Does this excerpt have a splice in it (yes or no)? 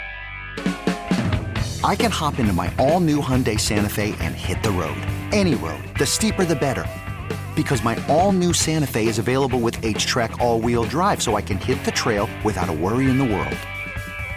no